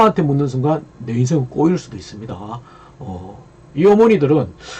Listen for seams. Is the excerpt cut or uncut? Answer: uncut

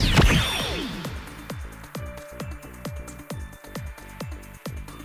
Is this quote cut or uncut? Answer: cut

